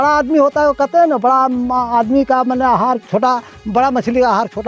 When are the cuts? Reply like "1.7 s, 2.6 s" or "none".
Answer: none